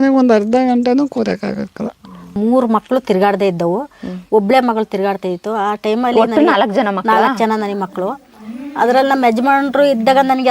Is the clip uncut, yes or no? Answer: no